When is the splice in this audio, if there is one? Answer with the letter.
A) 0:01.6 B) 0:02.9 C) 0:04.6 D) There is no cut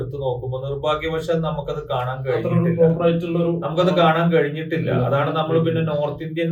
D